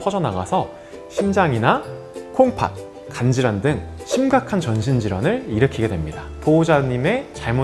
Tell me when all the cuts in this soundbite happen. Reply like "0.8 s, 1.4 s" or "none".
6.2 s